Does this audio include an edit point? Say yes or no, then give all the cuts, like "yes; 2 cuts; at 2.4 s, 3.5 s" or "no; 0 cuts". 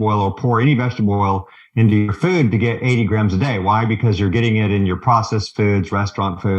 no; 0 cuts